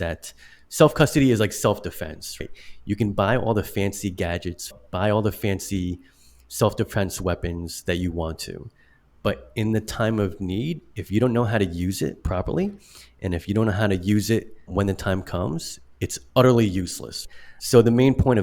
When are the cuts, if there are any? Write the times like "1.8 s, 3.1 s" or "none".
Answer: 4.7 s, 14.6 s